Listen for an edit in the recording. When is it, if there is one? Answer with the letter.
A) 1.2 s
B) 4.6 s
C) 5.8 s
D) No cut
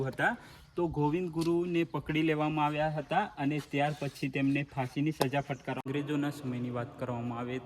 C